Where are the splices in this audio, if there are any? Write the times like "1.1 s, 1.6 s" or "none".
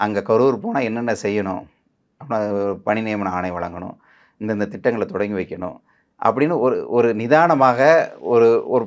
none